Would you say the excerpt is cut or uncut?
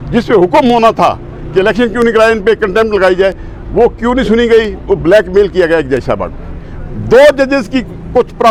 uncut